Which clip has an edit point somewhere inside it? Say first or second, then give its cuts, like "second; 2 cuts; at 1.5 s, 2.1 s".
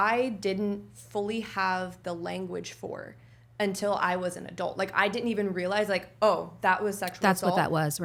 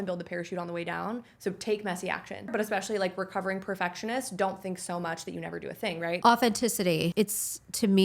second; 3 cuts; at 2.5 s, 6.2 s, 7.1 s